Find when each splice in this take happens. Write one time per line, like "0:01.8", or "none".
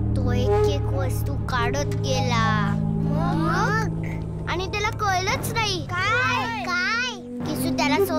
0:06.4

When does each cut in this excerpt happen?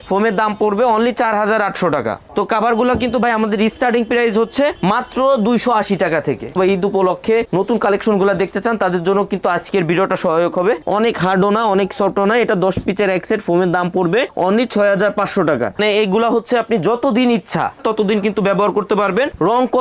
0:02.3
0:06.5
0:10.8
0:15.8

